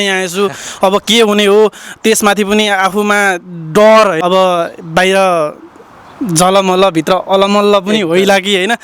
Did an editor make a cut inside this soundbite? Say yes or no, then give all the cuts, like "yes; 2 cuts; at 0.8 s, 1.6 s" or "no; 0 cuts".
yes; 1 cut; at 4.2 s